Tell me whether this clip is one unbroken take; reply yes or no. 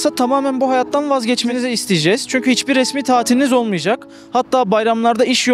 yes